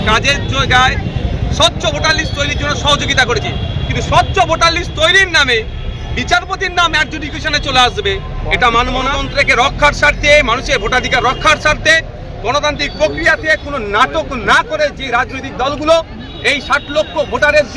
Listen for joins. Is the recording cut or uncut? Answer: cut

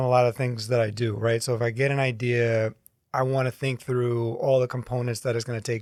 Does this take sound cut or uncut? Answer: uncut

